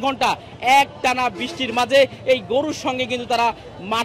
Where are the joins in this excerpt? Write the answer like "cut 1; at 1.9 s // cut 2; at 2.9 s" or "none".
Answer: none